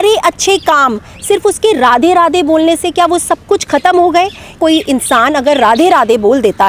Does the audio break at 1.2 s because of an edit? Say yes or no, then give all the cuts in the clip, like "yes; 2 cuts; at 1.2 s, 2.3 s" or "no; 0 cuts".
no; 1 cut; at 4.6 s